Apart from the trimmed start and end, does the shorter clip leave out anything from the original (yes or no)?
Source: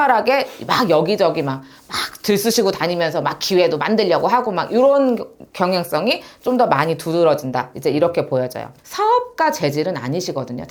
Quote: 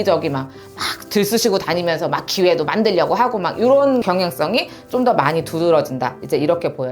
yes